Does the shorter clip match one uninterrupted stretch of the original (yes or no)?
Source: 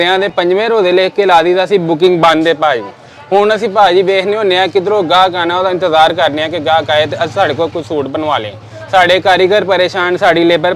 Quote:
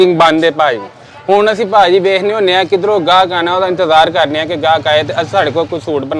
yes